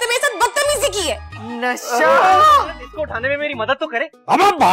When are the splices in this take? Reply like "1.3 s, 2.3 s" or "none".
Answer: 2.8 s